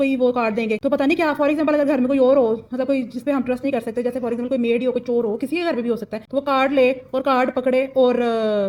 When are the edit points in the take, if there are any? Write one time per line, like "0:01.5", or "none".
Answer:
none